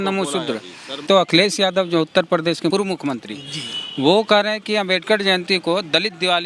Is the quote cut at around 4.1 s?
no; 1 cut; at 1.0 s

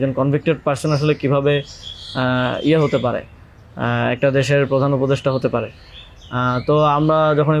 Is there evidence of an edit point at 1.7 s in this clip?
no; 0 cuts

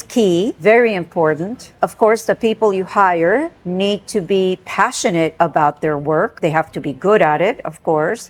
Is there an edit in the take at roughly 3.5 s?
no; 0 cuts

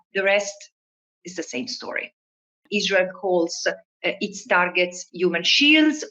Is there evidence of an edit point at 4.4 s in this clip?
no; 1 cut; at 2.7 s

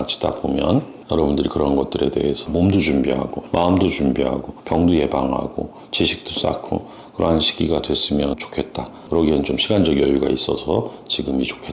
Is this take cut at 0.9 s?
no; 0 cuts

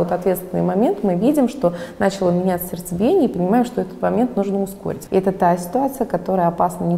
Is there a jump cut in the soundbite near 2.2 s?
no; 1 cut; at 4.9 s

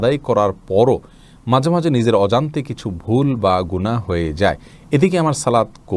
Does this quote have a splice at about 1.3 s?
no; 0 cuts

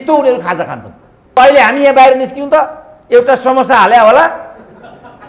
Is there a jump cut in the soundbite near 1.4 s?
yes; 1 cut; at 1.4 s

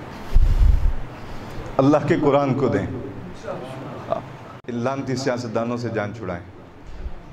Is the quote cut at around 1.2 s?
no; 1 cut; at 4.5 s

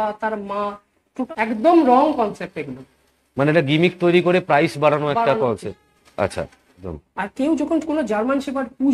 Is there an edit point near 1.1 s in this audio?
yes; 2 cuts; at 1.1 s, 7.0 s

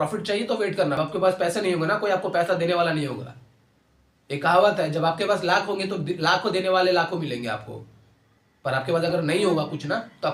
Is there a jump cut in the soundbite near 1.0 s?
yes; 1 cut; at 1.0 s

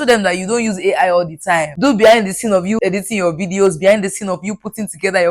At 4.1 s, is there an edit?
no; 2 cuts; at 1.7 s, 2.8 s

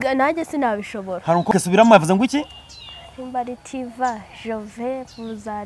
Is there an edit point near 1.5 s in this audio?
yes; 1 cut; at 1.5 s

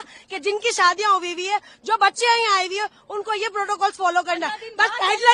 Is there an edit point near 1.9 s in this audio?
no; 0 cuts

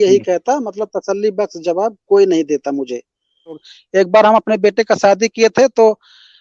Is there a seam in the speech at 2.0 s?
no; 1 cut; at 3.7 s

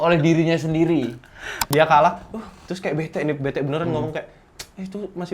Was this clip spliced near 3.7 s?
no; 1 cut; at 1.5 s

